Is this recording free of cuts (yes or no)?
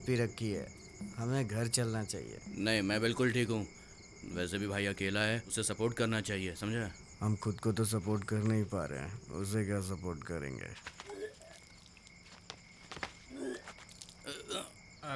yes